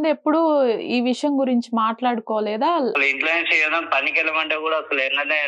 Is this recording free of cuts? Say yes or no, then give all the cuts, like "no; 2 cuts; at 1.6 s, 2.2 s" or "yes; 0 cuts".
no; 1 cut; at 2.9 s